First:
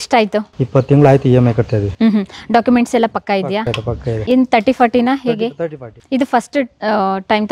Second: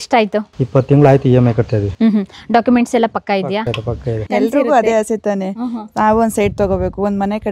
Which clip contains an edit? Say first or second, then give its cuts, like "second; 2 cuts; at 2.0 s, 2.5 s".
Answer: second; 1 cut; at 4.1 s